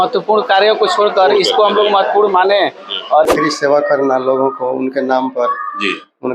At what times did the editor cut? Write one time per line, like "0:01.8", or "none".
0:03.3

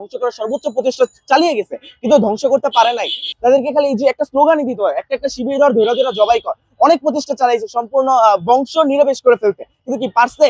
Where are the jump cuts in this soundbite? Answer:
0:03.2

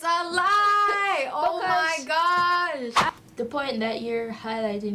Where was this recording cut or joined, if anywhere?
0:03.1

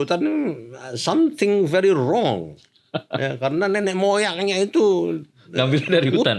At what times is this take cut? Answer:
none

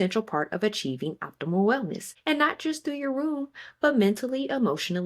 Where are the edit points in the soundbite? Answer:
0:02.1

